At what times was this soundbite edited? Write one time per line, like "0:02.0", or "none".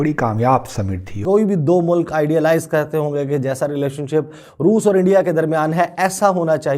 0:01.3